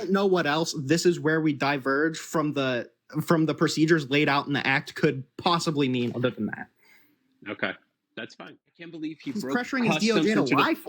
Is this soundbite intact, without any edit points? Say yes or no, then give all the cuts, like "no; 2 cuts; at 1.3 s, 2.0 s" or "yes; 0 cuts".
no; 1 cut; at 9.1 s